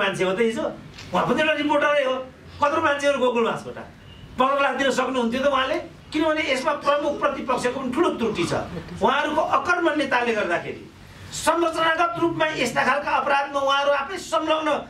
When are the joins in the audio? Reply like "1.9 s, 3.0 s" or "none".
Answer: 6.0 s

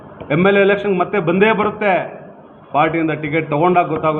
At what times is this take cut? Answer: none

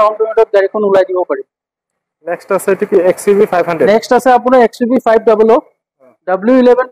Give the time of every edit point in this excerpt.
none

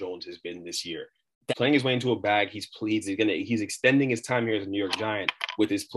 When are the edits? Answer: 1.5 s

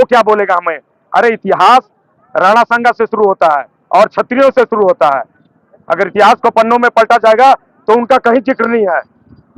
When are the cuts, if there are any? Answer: none

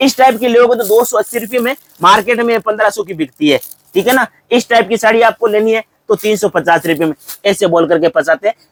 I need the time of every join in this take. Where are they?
none

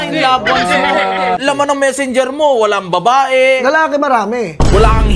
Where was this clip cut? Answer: 1.4 s

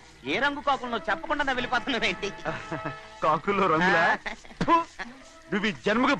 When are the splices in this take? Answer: none

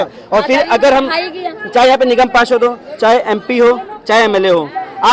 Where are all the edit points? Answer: none

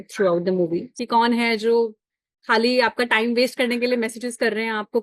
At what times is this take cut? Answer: 0.9 s

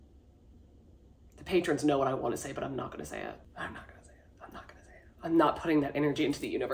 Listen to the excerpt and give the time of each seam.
3.5 s

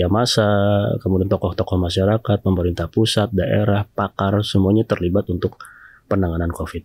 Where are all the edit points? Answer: none

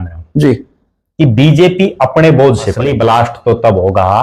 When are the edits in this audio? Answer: 2.8 s

